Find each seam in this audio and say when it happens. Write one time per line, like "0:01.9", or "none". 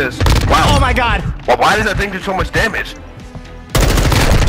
0:03.0